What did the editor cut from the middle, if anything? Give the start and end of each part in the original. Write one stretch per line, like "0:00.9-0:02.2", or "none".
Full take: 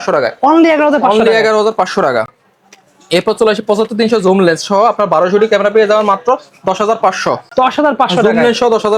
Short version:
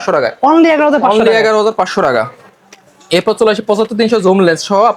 none